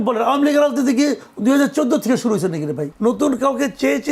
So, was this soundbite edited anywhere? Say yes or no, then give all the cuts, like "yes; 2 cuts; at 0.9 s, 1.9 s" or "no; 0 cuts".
yes; 1 cut; at 2.9 s